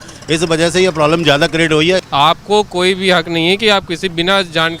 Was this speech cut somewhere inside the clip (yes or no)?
yes